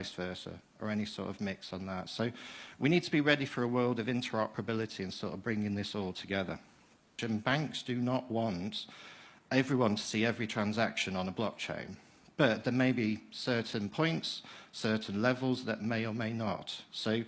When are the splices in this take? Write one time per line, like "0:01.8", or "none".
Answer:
0:07.2